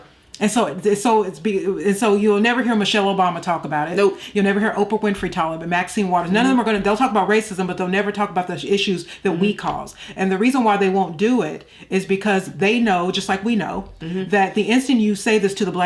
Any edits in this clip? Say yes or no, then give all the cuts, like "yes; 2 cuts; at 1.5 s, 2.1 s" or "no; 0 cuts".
no; 0 cuts